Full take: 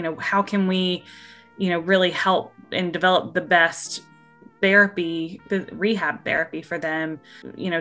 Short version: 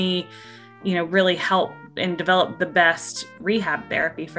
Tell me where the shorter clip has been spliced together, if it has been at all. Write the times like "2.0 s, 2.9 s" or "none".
3.4 s